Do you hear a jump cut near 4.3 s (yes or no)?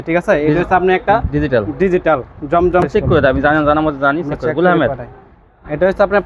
no